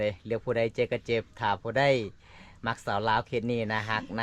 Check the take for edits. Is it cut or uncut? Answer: uncut